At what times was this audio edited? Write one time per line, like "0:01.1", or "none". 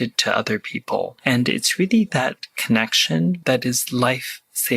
0:01.2
0:03.4